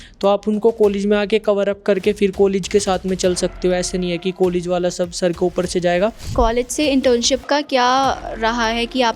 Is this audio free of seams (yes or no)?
no